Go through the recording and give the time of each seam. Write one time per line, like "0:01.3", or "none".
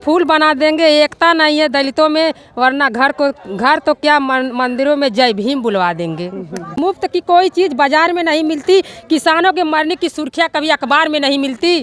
0:06.8